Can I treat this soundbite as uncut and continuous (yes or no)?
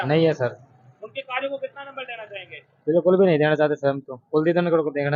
yes